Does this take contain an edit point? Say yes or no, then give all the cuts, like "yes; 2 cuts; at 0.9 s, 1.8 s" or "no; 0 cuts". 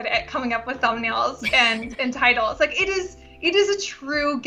no; 0 cuts